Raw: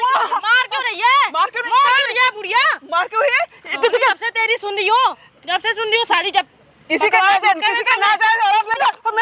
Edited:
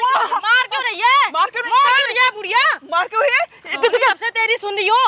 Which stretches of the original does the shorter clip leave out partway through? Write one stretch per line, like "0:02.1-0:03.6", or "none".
none